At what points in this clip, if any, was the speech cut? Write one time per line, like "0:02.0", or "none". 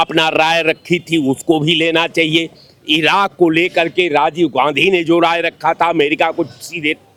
none